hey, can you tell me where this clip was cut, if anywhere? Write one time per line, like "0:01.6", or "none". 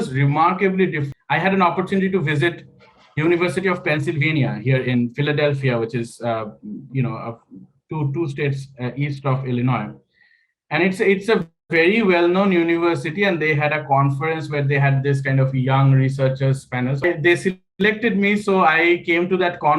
0:01.0
0:17.0